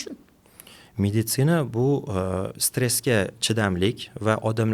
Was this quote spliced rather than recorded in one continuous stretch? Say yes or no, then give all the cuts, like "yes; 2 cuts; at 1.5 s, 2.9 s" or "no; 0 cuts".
no; 0 cuts